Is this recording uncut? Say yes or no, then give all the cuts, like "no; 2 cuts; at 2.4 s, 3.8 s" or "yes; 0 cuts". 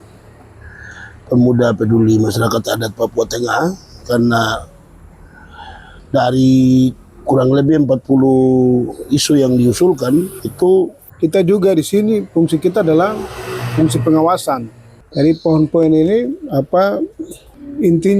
no; 3 cuts; at 10.4 s, 11.0 s, 15.0 s